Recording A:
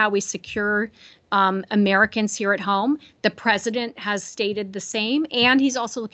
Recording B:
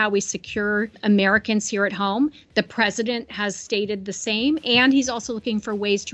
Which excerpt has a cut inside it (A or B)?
B